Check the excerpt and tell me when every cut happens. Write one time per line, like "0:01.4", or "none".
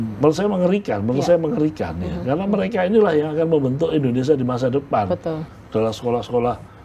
0:05.5

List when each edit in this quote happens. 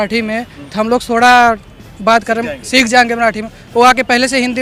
none

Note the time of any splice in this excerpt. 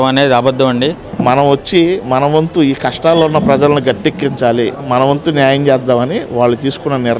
0:01.1

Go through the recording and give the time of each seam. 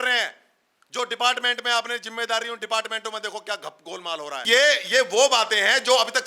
0:04.4

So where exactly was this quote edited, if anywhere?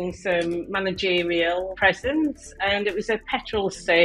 0:01.7

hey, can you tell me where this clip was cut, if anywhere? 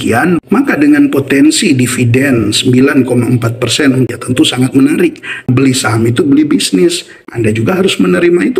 0:04.1
0:05.5
0:07.2

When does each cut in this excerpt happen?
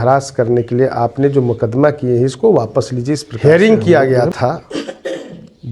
0:03.3

